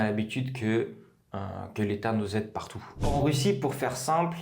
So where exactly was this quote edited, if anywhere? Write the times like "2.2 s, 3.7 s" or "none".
3.1 s